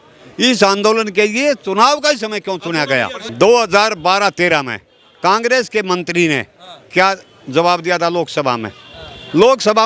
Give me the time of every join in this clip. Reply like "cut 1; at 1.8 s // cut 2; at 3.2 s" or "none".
cut 1; at 3.2 s